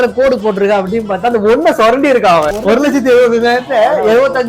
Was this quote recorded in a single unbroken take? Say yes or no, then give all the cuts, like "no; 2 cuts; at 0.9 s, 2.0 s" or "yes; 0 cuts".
no; 1 cut; at 2.5 s